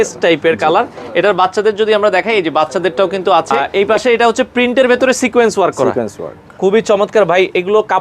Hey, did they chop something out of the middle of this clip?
yes; 1 cut; at 3.6 s

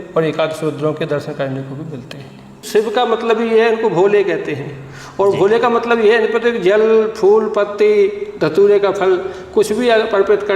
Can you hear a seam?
yes; 1 cut; at 2.5 s

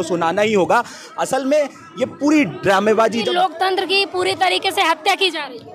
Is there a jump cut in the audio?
yes; 1 cut; at 3.3 s

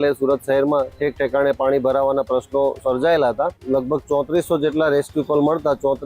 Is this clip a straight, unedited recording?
no; 1 cut; at 3.6 s

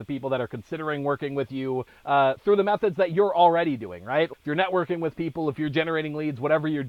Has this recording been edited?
yes; 1 cut; at 1.9 s

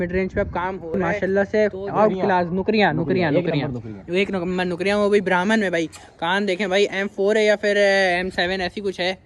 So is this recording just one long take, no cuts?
no; 1 cut; at 1.0 s

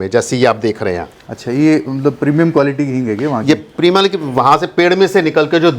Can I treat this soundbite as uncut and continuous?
yes; 0 cuts

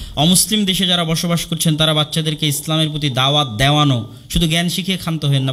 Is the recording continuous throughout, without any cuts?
yes; 0 cuts

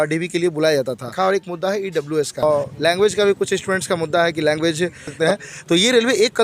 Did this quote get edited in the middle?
yes; 3 cuts; at 1.1 s, 2.4 s, 5.1 s

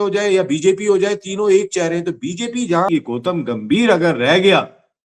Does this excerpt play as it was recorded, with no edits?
no; 1 cut; at 2.9 s

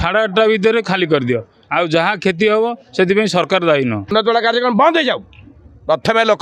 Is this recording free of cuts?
no; 1 cut; at 4.1 s

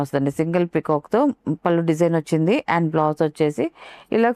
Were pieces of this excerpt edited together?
no; 0 cuts

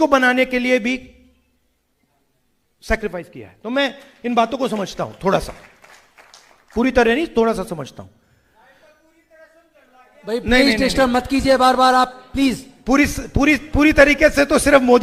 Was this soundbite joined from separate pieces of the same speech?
no; 0 cuts

